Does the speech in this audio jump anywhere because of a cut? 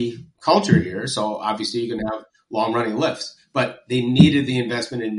no; 0 cuts

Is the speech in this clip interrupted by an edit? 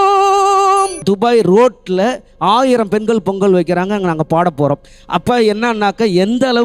yes; 1 cut; at 1.0 s

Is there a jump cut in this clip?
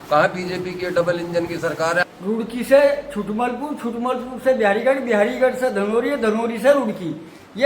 yes; 1 cut; at 2.0 s

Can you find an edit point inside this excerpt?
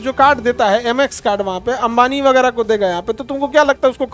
no; 0 cuts

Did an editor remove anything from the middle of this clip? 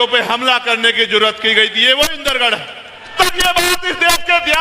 yes; 1 cut; at 3.1 s

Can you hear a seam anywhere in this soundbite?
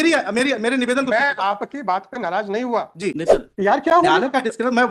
yes; 1 cut; at 3.1 s

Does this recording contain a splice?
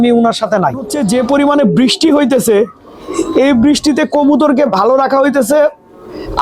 yes; 1 cut; at 0.9 s

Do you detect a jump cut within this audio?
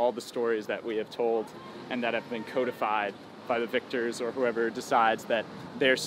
no; 0 cuts

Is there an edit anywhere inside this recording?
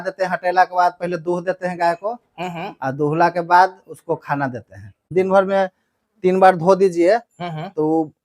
yes; 1 cut; at 5.1 s

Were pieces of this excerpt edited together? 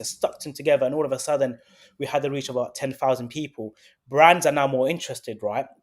no; 0 cuts

